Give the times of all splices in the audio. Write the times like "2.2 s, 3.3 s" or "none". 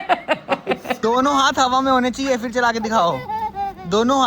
1.0 s